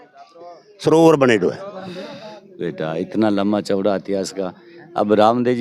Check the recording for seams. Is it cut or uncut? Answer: cut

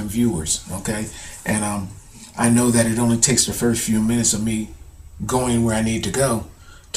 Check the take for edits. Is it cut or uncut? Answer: uncut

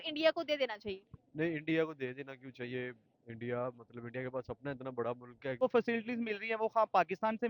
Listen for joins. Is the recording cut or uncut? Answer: cut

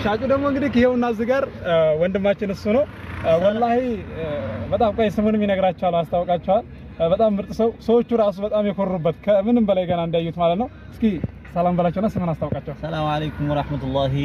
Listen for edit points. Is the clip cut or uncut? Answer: uncut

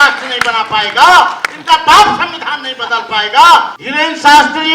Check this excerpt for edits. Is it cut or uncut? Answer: cut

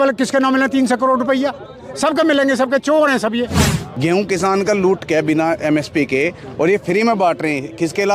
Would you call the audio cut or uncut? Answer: cut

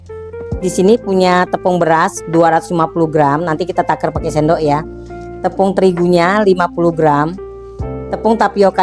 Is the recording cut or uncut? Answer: uncut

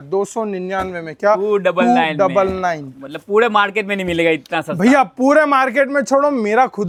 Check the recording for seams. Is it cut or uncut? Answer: uncut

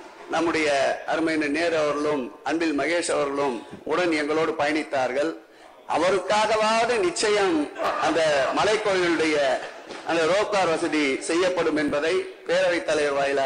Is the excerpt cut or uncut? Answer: uncut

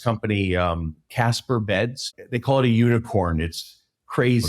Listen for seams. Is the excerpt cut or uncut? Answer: cut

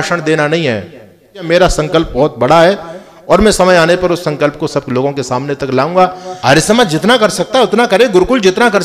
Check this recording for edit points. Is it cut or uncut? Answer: cut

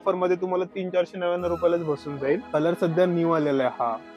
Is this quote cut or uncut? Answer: cut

